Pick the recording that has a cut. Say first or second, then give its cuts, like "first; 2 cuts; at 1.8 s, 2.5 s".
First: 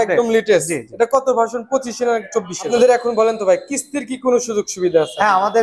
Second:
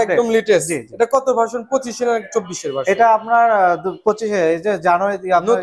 first; 1 cut; at 2.7 s